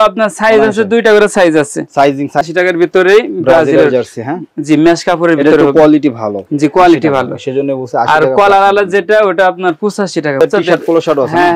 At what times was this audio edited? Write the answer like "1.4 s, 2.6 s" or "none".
2.4 s, 10.4 s